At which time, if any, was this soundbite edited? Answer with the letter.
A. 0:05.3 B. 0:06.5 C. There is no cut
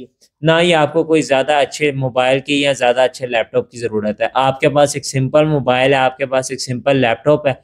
C